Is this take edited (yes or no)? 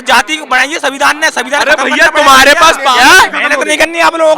yes